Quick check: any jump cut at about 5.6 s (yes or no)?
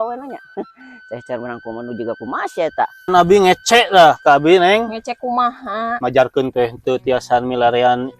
no